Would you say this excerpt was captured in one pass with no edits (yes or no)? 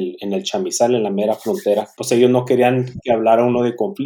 no